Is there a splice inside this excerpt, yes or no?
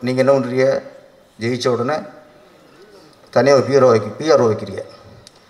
no